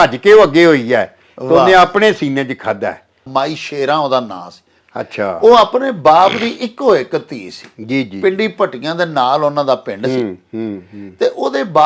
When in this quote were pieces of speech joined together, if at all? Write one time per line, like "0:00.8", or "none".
0:03.2